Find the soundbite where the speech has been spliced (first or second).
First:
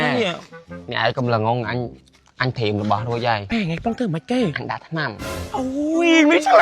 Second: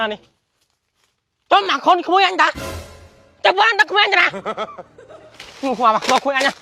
first